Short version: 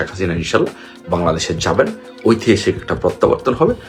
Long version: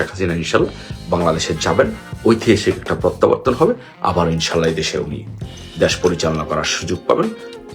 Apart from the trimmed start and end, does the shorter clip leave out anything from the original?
no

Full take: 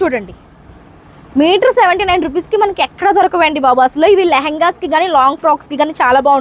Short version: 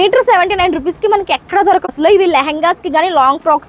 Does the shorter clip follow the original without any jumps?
no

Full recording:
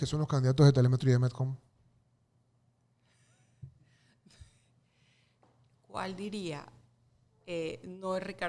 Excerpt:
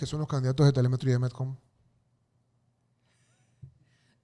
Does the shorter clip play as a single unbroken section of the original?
yes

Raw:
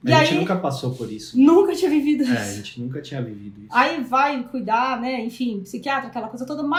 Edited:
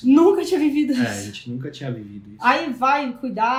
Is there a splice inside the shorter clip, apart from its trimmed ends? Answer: no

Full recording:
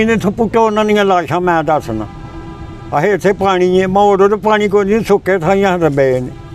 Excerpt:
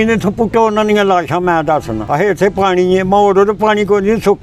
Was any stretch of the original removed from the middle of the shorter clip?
yes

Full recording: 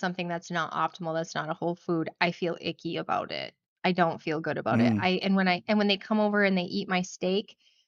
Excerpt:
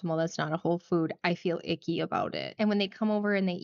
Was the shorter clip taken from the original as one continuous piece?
no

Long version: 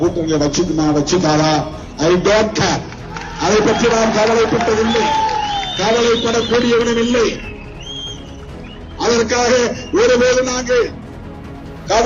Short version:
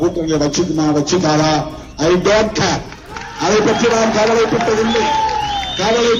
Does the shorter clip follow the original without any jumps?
yes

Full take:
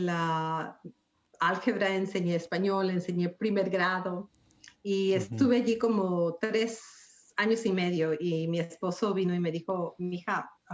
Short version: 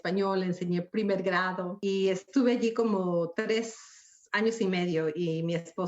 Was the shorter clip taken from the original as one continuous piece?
no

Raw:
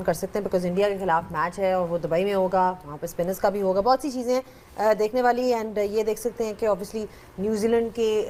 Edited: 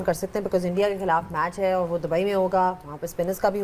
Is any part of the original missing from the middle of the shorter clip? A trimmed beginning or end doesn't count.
no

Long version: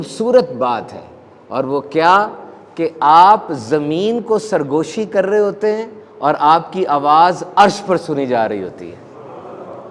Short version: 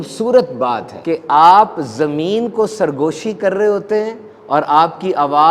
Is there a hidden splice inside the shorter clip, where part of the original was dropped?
yes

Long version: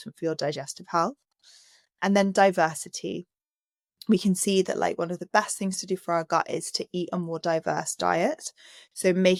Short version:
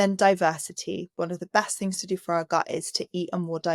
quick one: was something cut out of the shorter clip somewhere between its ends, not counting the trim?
yes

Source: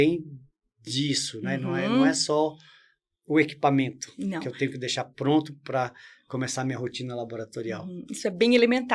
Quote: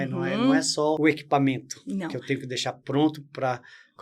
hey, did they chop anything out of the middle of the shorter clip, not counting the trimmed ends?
yes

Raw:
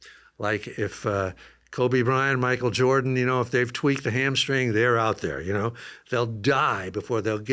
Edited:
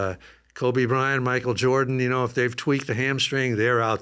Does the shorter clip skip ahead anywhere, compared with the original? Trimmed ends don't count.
no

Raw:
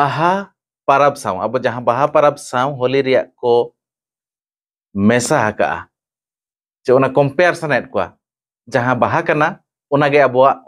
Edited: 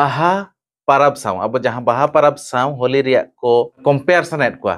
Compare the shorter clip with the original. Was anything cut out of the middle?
yes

